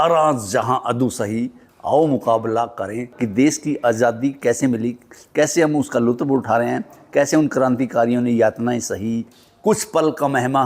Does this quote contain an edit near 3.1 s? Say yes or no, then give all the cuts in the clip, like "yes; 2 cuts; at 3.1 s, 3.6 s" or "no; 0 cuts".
yes; 2 cuts; at 3.1 s, 9.3 s